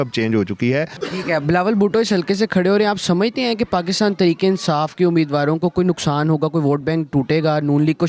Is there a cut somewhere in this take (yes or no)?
no